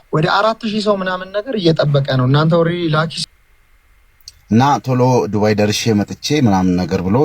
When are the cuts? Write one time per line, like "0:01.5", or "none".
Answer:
0:03.2